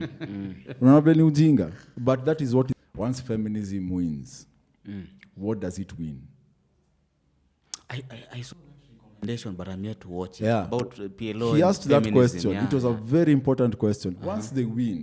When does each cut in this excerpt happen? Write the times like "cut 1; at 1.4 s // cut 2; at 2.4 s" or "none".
cut 1; at 2.7 s